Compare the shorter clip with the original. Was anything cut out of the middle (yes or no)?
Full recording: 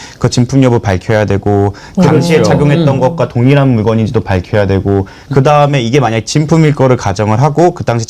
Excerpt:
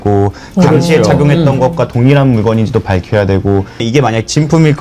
yes